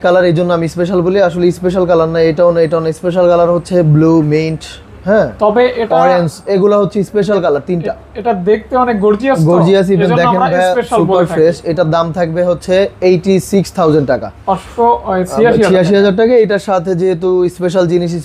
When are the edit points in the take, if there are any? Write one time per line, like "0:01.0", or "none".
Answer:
none